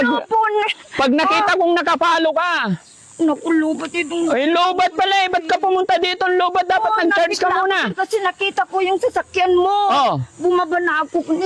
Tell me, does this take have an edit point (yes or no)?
no